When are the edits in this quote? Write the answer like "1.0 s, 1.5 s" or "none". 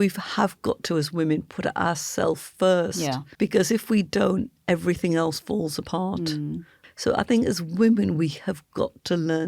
3.2 s, 6.8 s